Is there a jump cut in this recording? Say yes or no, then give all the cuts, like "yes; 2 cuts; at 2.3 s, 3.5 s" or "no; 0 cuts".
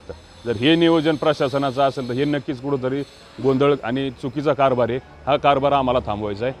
no; 0 cuts